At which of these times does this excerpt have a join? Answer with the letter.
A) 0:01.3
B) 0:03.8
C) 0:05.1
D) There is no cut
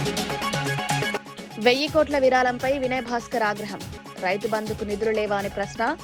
A